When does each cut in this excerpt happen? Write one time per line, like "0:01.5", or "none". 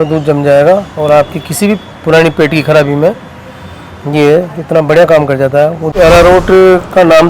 0:05.9